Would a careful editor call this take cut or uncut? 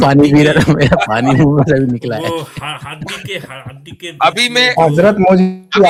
uncut